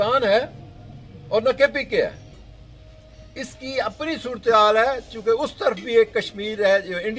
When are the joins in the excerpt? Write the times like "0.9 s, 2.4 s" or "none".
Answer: none